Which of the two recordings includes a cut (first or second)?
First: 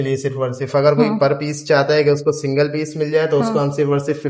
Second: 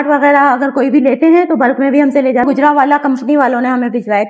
second